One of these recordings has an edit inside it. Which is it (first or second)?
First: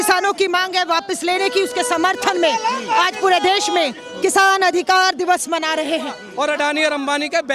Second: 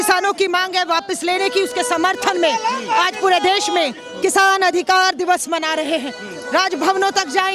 first